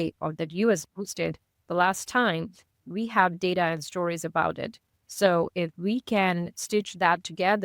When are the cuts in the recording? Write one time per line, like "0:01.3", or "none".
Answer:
none